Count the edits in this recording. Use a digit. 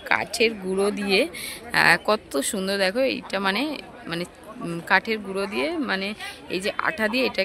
0